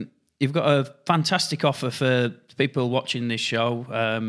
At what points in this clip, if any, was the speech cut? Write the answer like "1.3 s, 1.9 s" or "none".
none